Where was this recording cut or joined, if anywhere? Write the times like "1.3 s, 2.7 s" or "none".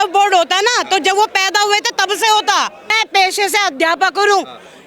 3.0 s

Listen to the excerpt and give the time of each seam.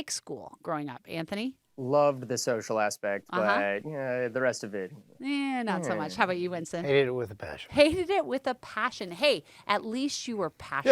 none

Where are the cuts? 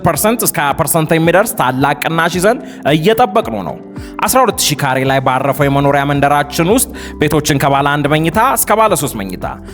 none

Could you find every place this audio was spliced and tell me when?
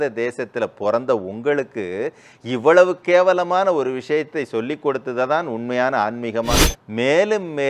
6.7 s

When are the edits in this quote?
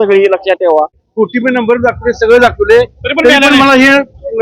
1.0 s

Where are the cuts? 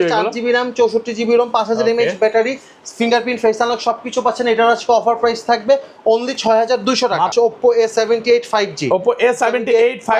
7.3 s

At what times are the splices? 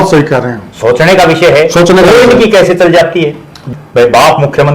3.6 s

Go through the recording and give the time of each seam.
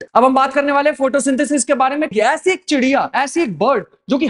2.1 s

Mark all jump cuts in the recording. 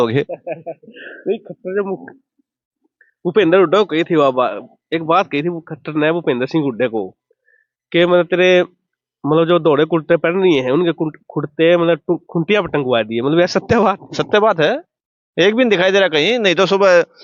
none

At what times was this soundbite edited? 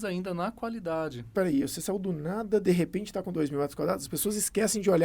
1.3 s

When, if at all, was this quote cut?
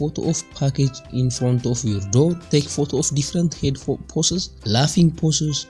2.4 s, 4.5 s

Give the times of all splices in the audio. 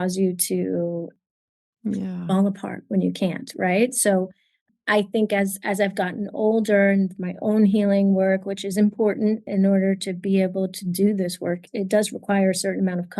9.5 s, 11.6 s

